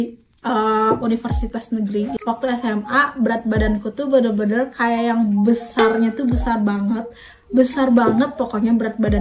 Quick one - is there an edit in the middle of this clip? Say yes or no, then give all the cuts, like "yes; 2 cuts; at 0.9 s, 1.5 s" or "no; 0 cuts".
yes; 1 cut; at 2.2 s